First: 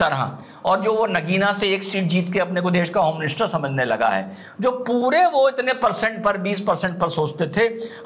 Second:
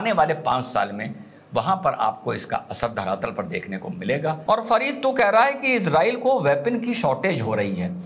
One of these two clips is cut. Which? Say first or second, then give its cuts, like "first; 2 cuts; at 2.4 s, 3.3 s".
second; 1 cut; at 4.4 s